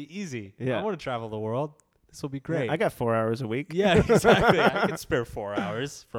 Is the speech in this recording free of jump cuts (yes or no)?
yes